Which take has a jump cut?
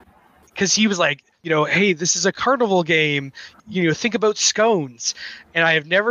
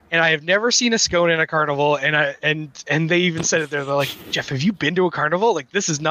first; 1 cut; at 2.4 s

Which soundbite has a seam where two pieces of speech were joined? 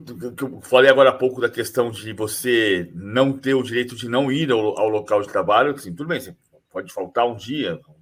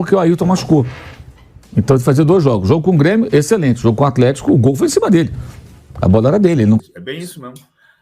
second; 1 cut; at 6.8 s

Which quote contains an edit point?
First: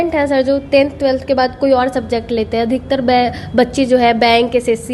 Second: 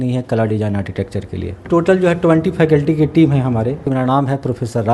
second; 2 cuts; at 1.6 s, 3.8 s

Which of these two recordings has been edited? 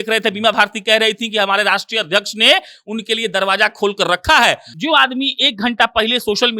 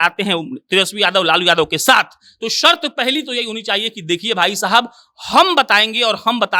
first; 1 cut; at 4.7 s

